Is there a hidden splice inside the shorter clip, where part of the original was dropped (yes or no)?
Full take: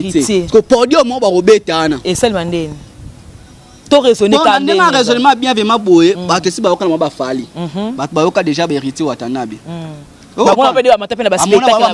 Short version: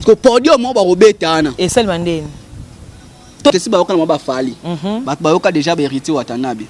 yes